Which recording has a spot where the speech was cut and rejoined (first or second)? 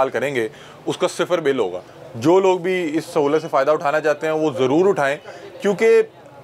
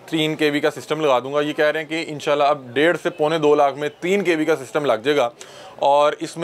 first